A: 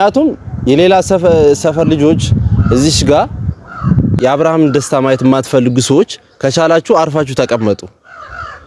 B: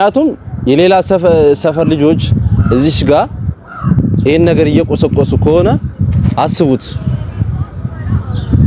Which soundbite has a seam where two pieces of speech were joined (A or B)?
A